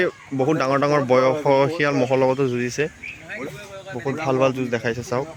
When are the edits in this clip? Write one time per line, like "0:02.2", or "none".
none